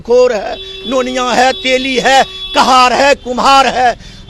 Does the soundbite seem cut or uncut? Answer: uncut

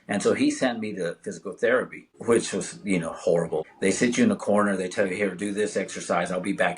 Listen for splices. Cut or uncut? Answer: cut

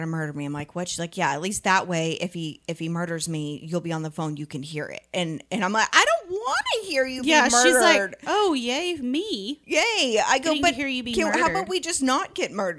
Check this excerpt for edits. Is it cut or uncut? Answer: uncut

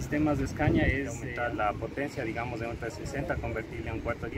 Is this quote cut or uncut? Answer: cut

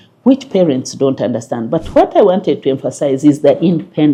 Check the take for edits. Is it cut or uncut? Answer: uncut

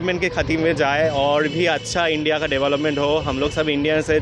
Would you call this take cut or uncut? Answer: uncut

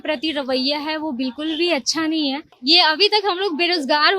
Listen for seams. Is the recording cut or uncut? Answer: cut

